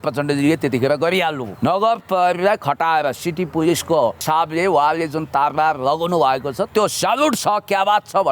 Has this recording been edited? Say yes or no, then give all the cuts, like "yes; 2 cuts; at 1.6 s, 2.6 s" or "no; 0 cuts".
yes; 2 cuts; at 1.5 s, 4.2 s